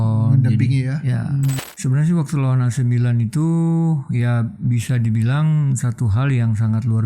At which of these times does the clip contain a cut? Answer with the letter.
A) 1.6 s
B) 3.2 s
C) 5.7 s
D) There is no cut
A